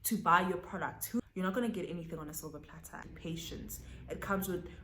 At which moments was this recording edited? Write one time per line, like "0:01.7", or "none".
0:01.2
0:03.0